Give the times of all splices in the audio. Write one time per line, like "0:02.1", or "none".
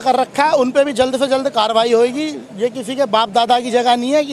none